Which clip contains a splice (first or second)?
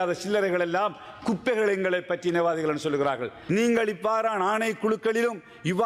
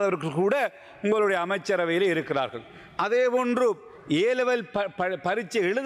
first